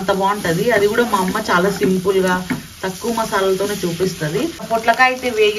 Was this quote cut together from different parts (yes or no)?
yes